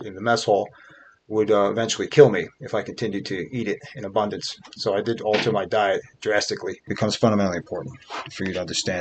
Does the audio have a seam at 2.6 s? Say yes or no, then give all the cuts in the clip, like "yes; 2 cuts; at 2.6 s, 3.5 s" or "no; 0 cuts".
no; 1 cut; at 6.9 s